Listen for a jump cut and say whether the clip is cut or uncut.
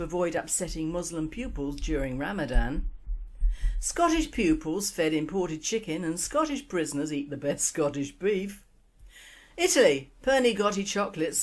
cut